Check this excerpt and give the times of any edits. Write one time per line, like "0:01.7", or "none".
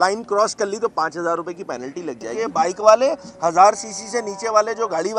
0:02.2